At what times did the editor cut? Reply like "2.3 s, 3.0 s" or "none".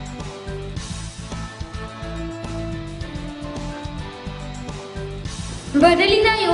0.8 s, 2.2 s